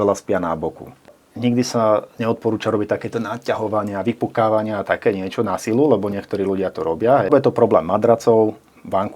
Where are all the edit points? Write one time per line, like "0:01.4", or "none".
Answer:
0:01.2
0:07.3